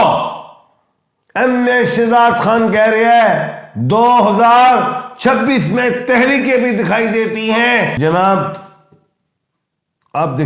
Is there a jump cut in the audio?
yes; 1 cut; at 7.9 s

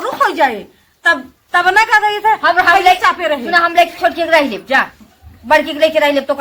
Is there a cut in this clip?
no; 0 cuts

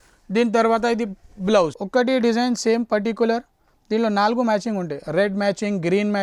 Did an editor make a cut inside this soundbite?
yes; 1 cut; at 1.8 s

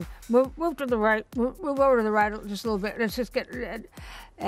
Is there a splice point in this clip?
no; 0 cuts

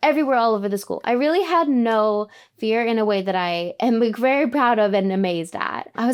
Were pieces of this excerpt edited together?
no; 0 cuts

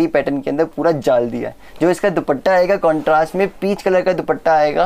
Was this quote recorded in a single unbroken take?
yes; 0 cuts

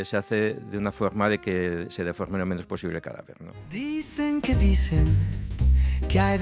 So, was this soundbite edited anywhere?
yes; 1 cut; at 3.6 s

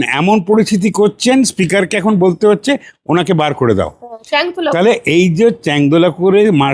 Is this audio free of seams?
yes; 0 cuts

